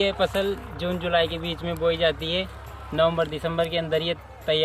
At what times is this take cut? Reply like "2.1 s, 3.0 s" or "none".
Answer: none